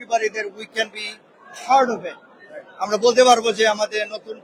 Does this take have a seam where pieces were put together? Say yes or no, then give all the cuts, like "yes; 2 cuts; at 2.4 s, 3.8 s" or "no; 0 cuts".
no; 0 cuts